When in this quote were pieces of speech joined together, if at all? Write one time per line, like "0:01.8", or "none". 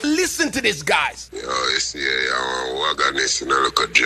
0:01.2